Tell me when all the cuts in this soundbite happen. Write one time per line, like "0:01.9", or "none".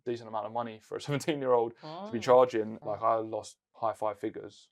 0:02.7
0:03.6